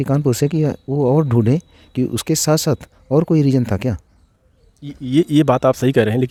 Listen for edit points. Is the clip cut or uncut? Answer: uncut